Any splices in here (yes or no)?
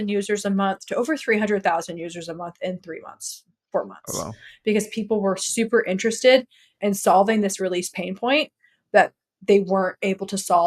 no